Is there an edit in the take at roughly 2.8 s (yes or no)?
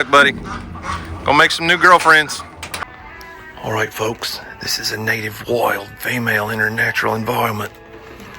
yes